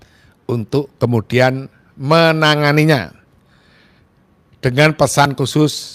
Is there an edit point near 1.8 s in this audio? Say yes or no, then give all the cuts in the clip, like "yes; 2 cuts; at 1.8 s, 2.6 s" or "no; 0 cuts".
no; 0 cuts